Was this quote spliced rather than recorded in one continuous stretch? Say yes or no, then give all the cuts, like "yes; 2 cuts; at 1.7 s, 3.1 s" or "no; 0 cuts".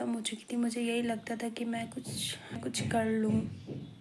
yes; 1 cut; at 2.6 s